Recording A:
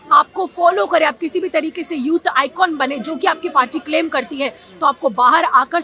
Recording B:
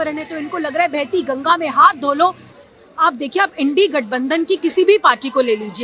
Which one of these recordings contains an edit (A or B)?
B